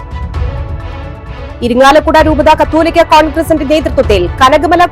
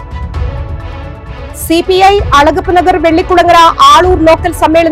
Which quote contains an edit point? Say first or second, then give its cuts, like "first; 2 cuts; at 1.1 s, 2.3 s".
first; 1 cut; at 1.5 s